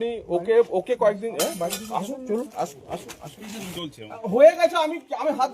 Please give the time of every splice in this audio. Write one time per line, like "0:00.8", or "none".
0:03.8